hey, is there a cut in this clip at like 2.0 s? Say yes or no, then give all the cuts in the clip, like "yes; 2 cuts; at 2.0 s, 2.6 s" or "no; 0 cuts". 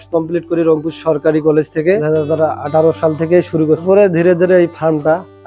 yes; 2 cuts; at 2.0 s, 3.8 s